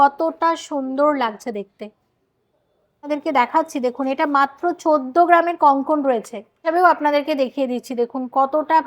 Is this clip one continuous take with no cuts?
no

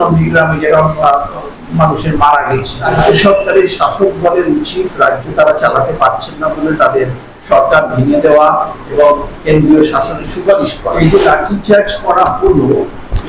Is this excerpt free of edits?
no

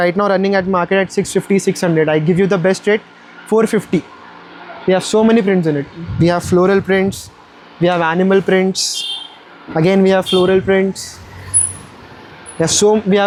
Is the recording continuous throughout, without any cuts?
yes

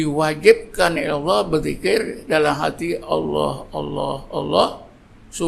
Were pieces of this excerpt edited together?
no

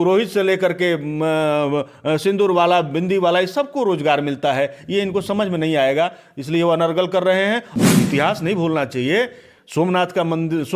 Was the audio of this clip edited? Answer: yes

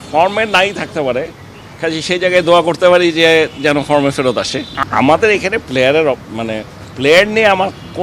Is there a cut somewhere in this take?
yes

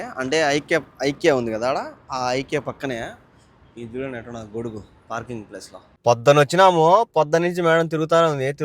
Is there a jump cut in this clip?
yes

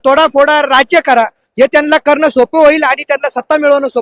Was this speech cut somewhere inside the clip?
no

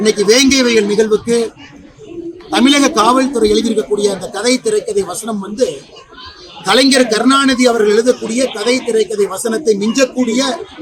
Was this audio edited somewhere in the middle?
no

